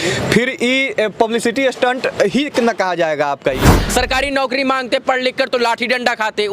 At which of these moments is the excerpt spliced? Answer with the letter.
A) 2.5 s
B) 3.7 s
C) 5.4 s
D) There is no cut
B